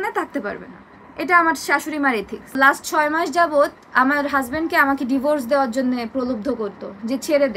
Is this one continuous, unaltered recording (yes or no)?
no